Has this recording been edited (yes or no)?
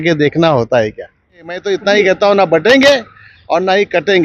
yes